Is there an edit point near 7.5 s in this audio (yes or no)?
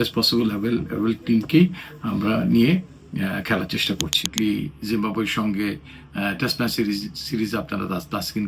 no